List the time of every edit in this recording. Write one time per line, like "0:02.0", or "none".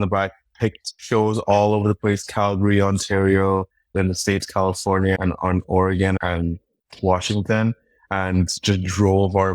0:00.9